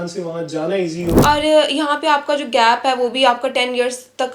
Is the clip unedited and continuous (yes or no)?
no